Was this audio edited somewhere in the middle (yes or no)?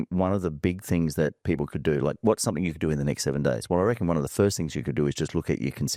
no